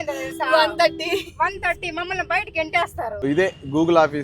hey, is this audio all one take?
no; 1 cut; at 3.3 s

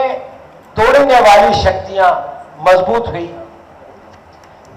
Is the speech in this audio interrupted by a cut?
no; 0 cuts

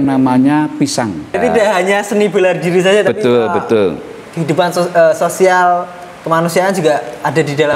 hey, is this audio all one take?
no; 1 cut; at 1.4 s

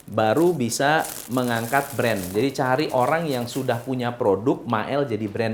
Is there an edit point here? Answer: no; 0 cuts

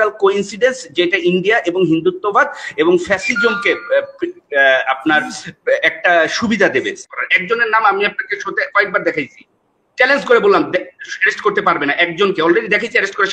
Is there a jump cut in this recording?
yes; 1 cut; at 7.0 s

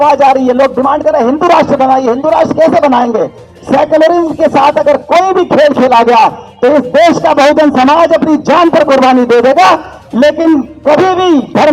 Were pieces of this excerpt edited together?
no; 0 cuts

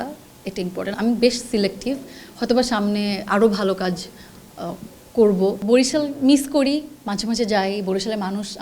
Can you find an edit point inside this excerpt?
yes; 2 cuts; at 0.9 s, 5.6 s

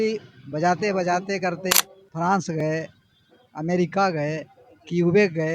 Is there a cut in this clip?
yes; 1 cut; at 1.7 s

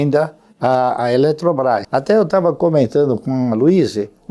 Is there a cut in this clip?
yes; 1 cut; at 1.9 s

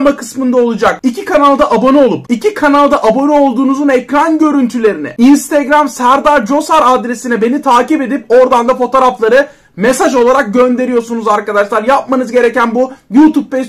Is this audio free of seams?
no; 3 cuts; at 1.0 s, 2.3 s, 5.1 s

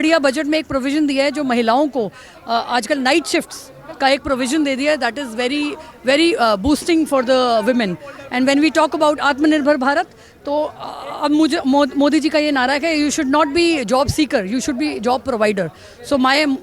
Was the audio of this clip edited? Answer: no; 0 cuts

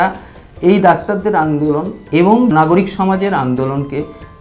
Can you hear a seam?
yes; 1 cut; at 2.5 s

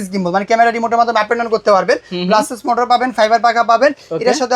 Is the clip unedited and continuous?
yes; 0 cuts

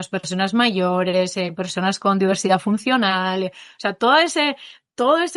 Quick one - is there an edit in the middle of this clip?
no; 0 cuts

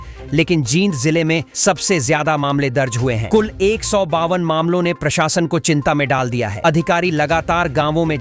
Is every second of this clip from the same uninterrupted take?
yes; 0 cuts

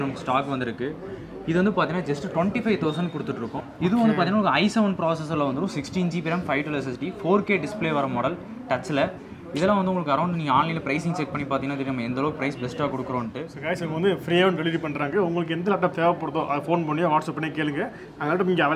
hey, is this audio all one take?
no; 2 cuts; at 3.6 s, 13.5 s

